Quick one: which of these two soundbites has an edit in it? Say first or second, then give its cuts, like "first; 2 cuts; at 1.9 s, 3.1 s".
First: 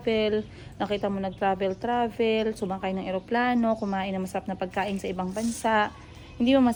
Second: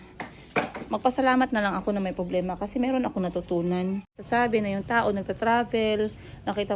second; 1 cut; at 4.1 s